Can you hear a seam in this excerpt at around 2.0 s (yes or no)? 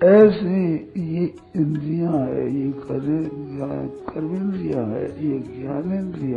no